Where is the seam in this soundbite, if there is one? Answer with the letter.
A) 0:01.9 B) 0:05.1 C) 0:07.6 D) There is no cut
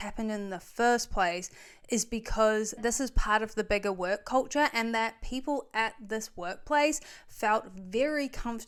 D